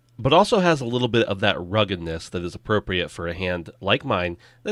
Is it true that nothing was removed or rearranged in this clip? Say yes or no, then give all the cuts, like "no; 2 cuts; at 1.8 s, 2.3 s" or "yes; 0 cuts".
yes; 0 cuts